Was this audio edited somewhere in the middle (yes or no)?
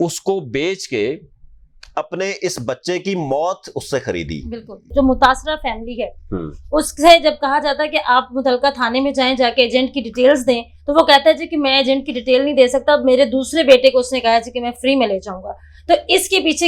yes